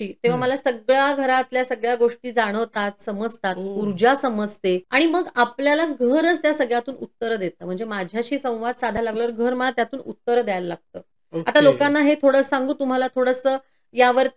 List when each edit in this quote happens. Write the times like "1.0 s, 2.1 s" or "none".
none